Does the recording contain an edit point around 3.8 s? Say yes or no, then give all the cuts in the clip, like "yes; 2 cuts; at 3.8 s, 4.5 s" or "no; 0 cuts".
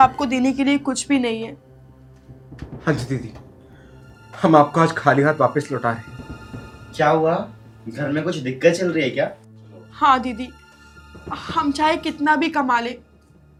no; 0 cuts